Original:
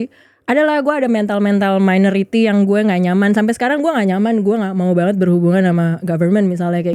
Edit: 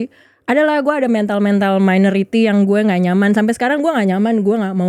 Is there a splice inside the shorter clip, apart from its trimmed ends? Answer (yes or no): no